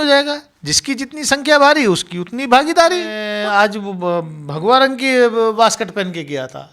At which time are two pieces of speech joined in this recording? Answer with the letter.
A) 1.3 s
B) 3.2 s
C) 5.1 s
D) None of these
B